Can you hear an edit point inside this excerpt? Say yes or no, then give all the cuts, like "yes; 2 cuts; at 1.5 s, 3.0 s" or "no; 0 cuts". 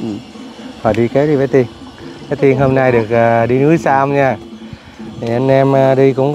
no; 0 cuts